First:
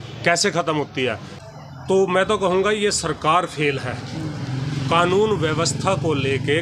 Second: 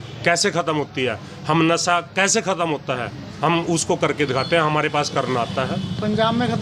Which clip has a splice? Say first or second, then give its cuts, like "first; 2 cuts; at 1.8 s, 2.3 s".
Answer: first; 1 cut; at 1.3 s